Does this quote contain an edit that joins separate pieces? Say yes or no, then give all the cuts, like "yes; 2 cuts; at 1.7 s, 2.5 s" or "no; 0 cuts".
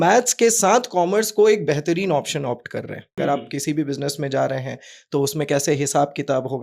yes; 1 cut; at 3.1 s